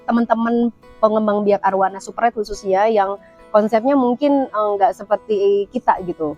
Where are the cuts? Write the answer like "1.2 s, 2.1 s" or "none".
none